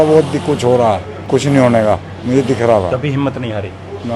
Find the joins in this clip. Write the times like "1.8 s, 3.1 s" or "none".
1.1 s

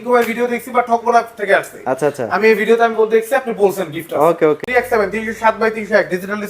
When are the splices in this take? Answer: 4.6 s

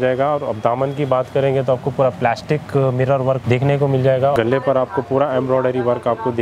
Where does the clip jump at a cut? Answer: 3.4 s, 4.3 s

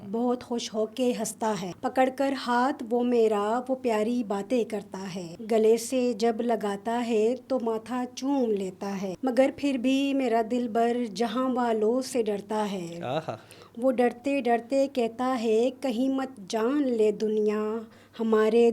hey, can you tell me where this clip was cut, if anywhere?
1.7 s, 5.3 s, 9.1 s

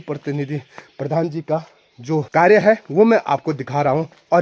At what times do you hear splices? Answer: 2.3 s

